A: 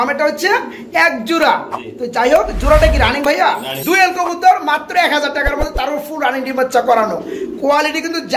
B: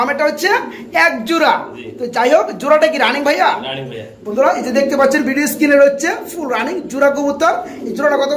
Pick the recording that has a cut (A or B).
A